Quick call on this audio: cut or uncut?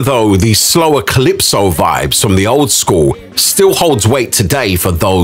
uncut